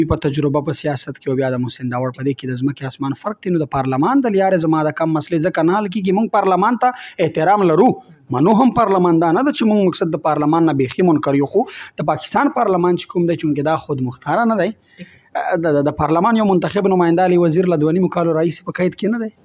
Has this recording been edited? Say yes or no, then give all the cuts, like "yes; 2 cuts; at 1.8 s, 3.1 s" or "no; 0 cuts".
no; 0 cuts